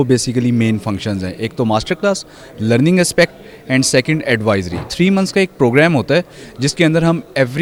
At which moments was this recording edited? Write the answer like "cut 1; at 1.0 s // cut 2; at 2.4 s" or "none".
none